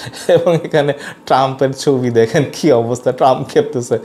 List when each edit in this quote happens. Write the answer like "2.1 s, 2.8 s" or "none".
none